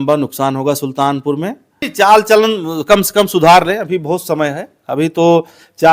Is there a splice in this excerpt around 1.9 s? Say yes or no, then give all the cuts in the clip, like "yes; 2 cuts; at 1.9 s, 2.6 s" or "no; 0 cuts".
yes; 1 cut; at 1.9 s